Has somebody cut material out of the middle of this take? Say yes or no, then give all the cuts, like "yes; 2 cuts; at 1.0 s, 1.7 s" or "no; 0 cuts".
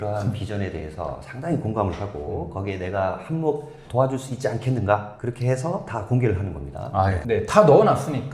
yes; 1 cut; at 7.2 s